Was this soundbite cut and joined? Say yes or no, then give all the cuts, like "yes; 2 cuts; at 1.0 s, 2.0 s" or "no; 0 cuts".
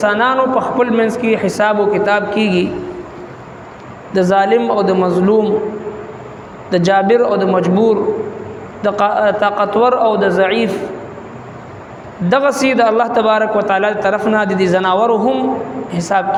no; 0 cuts